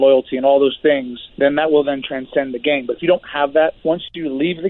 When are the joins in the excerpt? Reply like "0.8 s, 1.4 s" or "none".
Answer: 1.2 s, 3.8 s